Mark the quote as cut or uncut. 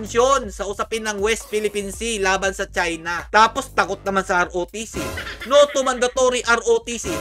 uncut